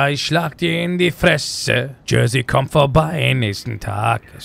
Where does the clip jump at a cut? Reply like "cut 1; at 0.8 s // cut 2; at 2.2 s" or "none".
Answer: cut 1; at 1.9 s